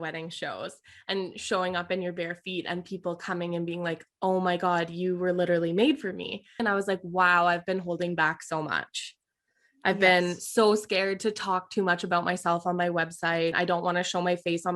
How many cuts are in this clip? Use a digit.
2